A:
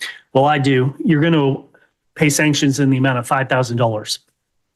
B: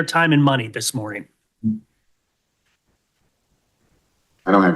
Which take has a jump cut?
B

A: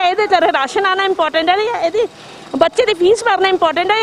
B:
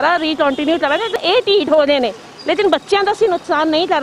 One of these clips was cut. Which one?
B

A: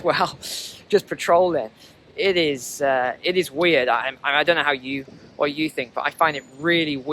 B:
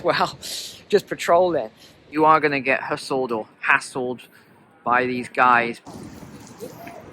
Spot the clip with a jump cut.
B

